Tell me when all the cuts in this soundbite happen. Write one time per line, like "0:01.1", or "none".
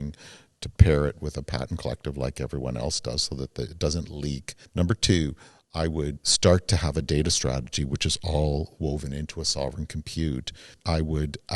0:04.5
0:06.2
0:10.7